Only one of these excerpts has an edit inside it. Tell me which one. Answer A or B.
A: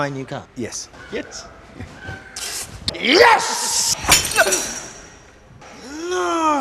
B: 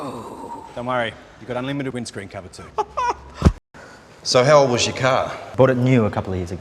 B